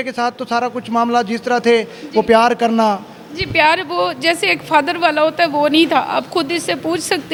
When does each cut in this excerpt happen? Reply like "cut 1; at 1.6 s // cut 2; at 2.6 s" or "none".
none